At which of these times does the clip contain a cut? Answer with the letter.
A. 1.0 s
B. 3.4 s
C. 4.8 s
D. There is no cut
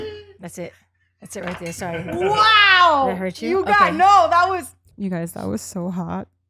C